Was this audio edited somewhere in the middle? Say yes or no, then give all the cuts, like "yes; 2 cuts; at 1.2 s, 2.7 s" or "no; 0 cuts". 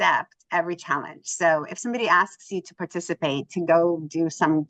no; 0 cuts